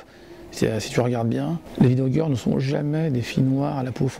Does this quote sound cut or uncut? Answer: cut